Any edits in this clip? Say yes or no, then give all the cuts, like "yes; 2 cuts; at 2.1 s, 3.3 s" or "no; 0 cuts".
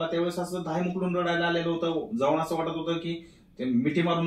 no; 0 cuts